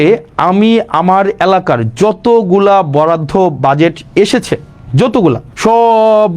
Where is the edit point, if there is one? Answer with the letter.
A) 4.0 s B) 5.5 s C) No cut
B